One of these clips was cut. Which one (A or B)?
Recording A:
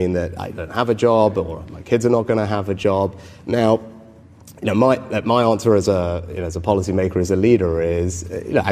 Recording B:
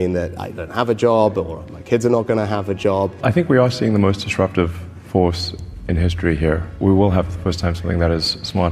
B